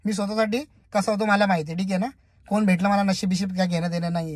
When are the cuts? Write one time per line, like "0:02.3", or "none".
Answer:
none